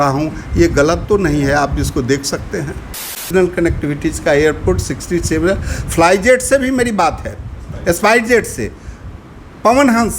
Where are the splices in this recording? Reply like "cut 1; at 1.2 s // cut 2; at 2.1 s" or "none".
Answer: cut 1; at 3.3 s